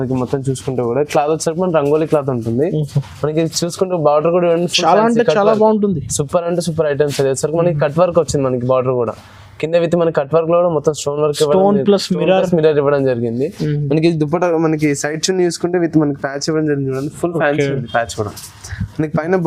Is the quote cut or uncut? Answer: uncut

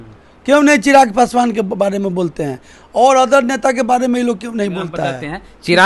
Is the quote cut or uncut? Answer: uncut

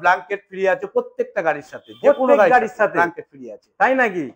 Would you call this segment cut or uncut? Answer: uncut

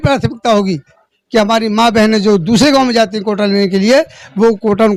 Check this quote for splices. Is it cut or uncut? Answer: uncut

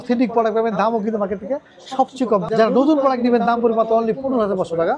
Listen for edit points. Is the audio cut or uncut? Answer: cut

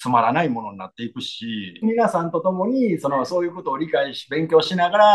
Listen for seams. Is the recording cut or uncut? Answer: cut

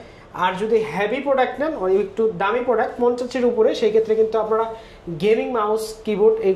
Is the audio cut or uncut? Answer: uncut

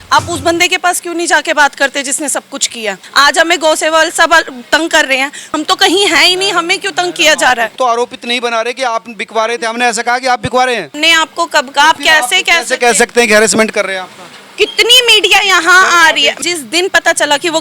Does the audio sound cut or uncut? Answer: cut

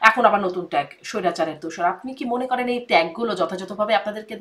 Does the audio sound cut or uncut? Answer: uncut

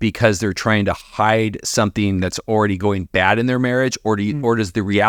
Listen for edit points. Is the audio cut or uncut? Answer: uncut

